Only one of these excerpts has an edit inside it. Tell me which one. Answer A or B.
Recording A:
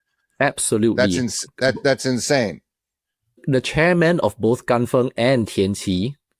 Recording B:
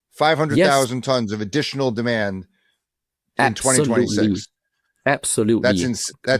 A